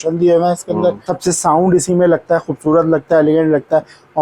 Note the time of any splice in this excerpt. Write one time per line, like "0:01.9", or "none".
0:01.1